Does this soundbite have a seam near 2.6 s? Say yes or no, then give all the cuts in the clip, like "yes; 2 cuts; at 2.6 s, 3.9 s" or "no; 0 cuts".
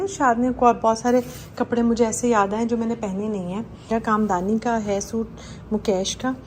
no; 1 cut; at 3.9 s